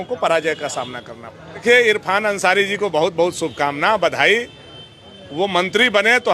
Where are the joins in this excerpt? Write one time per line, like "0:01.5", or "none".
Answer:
0:01.6